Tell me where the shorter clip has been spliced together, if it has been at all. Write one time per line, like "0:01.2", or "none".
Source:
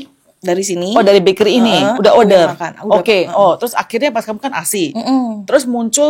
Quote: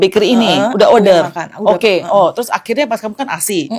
none